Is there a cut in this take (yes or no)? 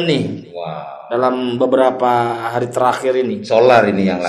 no